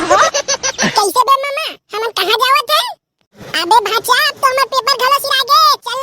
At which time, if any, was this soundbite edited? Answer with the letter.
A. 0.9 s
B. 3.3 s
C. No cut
A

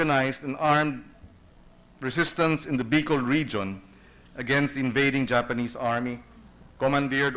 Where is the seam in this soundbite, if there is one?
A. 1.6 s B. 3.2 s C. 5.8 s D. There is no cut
B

